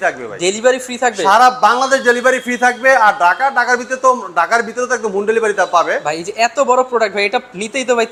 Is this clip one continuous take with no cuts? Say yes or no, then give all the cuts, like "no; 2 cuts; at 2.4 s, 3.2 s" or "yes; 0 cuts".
yes; 0 cuts